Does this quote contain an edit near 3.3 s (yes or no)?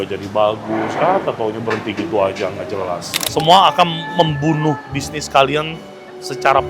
yes